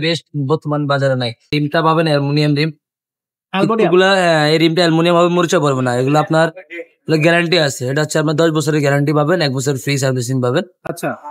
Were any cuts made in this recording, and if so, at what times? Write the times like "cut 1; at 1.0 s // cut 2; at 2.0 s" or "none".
cut 1; at 1.5 s